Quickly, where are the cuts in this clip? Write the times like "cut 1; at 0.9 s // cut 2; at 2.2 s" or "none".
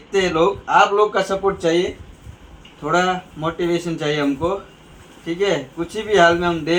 none

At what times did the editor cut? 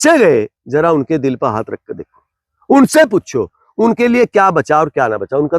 none

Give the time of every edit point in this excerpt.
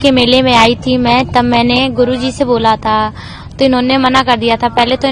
none

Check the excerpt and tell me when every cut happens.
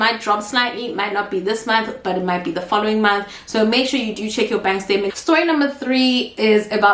cut 1; at 5.1 s

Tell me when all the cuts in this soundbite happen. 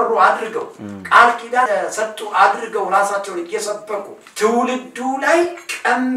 cut 1; at 1.7 s // cut 2; at 4.2 s

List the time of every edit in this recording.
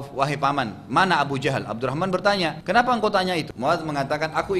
cut 1; at 2.6 s // cut 2; at 3.5 s

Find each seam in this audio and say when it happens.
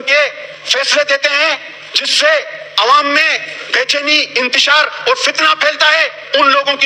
none

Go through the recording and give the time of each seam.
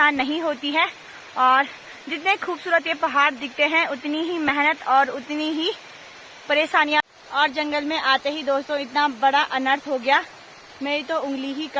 cut 1; at 7.0 s

